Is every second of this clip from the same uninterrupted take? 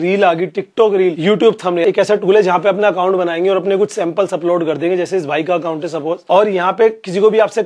no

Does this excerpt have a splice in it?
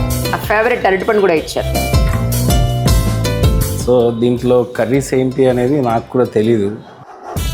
no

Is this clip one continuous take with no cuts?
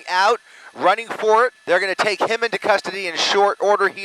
no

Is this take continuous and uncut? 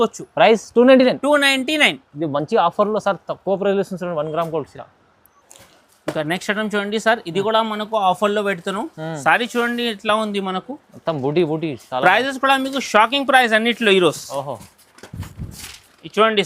yes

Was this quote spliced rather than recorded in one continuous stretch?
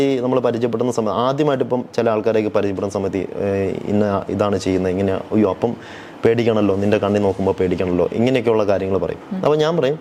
no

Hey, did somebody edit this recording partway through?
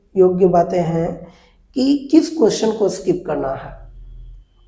no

